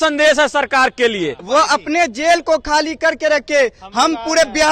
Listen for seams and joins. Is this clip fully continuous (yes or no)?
no